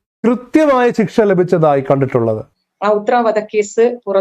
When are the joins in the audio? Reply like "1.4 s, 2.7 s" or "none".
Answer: 2.5 s

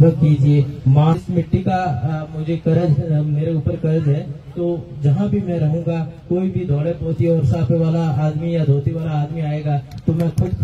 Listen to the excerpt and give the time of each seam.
1.1 s

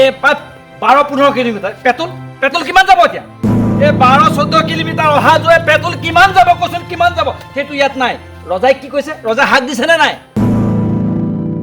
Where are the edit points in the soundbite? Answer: 10.3 s

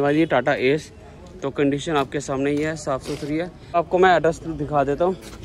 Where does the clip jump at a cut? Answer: 3.7 s

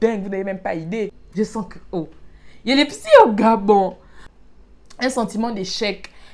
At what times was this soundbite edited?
1.2 s, 4.2 s

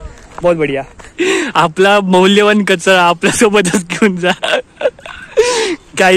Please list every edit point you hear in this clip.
1.0 s

